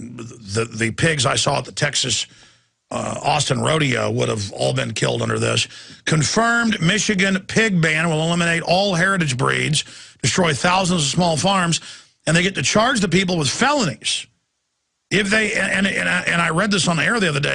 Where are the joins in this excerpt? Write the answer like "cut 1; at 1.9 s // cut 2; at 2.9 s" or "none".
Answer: cut 1; at 13.5 s